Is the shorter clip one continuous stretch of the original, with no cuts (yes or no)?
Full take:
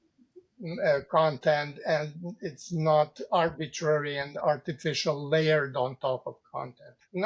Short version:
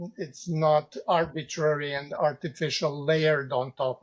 yes